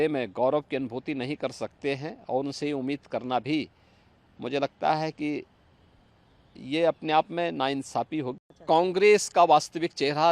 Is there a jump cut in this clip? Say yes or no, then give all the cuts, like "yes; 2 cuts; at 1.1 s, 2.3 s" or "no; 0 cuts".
yes; 1 cut; at 8.4 s